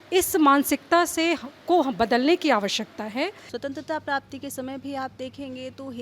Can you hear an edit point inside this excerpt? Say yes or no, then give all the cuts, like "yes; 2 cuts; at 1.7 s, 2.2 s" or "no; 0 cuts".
yes; 1 cut; at 3.4 s